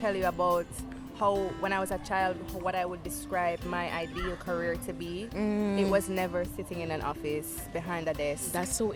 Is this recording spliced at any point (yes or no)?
no